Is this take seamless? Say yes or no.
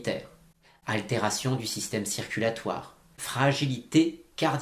no